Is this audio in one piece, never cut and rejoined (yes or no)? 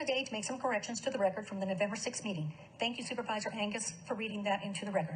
yes